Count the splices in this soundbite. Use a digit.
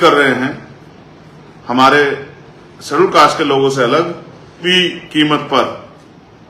1